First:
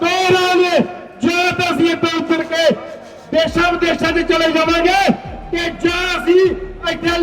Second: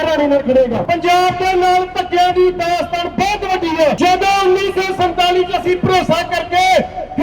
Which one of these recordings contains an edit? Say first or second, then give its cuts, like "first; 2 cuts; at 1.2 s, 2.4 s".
second; 2 cuts; at 0.8 s, 4.0 s